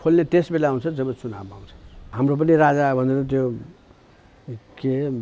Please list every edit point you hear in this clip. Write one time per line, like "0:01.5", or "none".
0:02.1